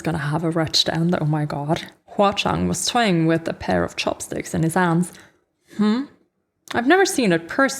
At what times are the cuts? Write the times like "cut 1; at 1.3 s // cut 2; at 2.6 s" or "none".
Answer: cut 1; at 2.0 s